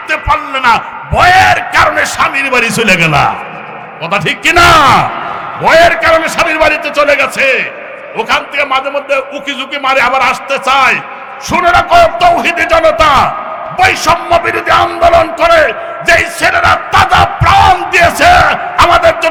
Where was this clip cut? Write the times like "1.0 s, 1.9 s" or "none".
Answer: none